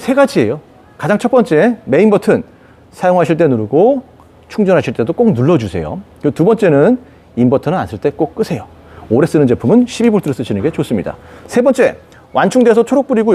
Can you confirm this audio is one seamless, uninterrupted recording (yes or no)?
yes